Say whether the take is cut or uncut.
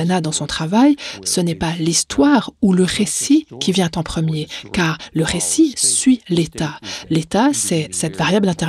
uncut